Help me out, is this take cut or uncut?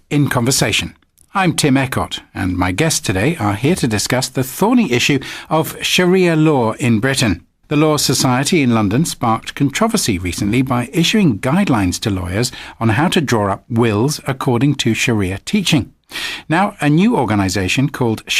uncut